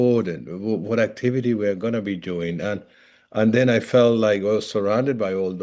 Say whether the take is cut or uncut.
uncut